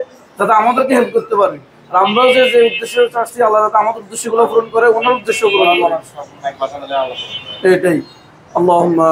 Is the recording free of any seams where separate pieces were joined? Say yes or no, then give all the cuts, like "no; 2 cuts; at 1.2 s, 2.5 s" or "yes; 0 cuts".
yes; 0 cuts